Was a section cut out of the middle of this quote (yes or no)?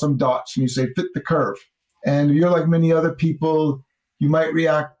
no